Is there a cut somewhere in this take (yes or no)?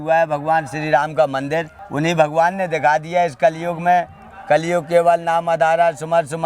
yes